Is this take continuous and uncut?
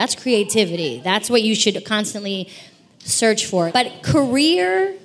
no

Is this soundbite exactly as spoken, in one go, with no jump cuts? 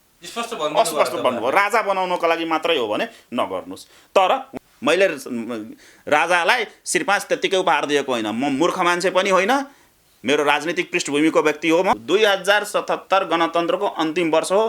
no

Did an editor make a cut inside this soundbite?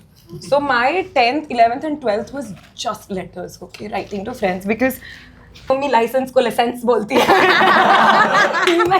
yes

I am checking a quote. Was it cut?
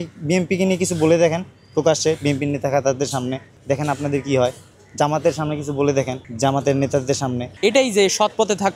yes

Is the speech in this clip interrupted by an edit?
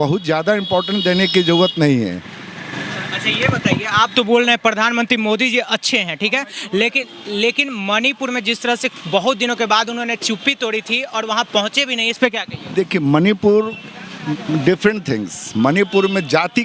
no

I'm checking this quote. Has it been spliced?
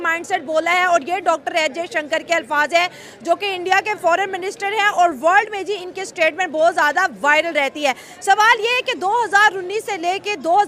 no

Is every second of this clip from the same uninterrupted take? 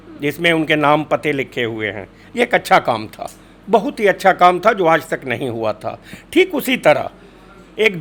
yes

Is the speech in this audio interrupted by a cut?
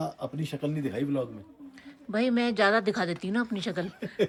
no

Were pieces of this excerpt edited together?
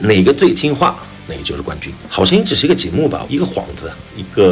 yes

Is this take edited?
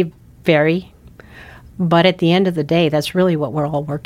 no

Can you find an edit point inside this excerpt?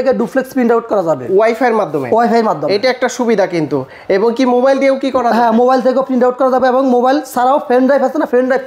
no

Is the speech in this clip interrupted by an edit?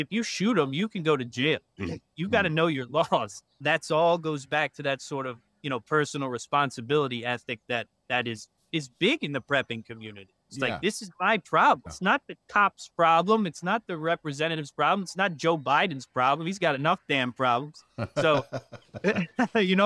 yes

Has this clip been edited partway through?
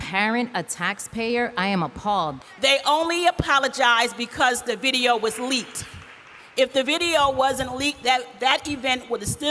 yes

